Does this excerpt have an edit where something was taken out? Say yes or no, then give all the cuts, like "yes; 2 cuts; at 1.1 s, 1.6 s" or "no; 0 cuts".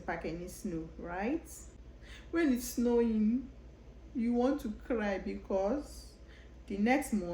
yes; 1 cut; at 1.6 s